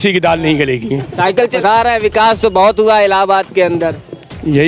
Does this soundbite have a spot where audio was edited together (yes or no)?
yes